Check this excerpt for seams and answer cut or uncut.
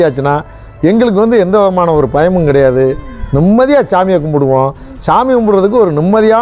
uncut